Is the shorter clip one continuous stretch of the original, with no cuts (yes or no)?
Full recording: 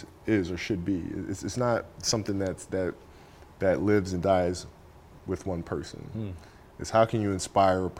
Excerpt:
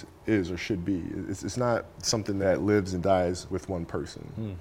no